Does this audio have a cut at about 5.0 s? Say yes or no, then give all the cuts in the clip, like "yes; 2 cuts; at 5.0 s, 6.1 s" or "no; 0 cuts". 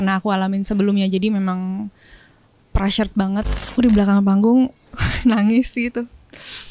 no; 1 cut; at 3.6 s